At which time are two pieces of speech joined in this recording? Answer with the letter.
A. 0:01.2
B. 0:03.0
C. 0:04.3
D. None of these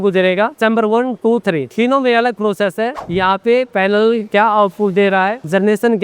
B